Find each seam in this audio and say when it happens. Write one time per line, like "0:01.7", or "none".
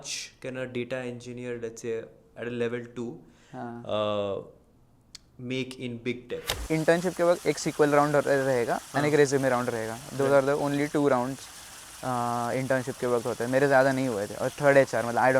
0:06.5